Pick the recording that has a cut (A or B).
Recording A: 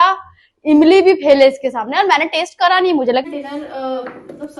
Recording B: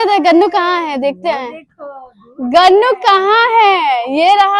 A